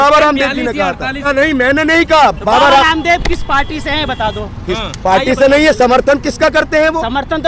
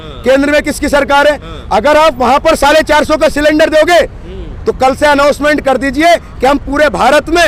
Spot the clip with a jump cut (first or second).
first